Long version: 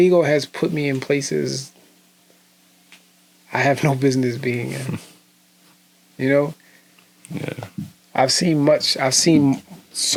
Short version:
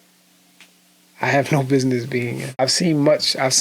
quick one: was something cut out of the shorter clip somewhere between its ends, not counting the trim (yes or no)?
yes